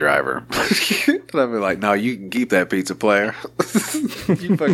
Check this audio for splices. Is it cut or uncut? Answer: uncut